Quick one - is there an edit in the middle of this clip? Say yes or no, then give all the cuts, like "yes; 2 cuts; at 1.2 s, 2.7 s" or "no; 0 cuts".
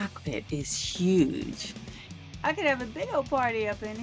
no; 0 cuts